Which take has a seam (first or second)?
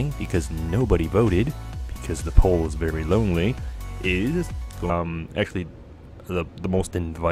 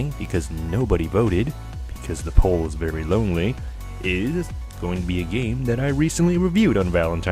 second